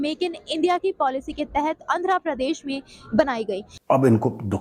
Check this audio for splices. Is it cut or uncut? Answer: cut